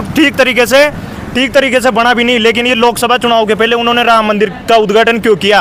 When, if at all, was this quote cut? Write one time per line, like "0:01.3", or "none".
none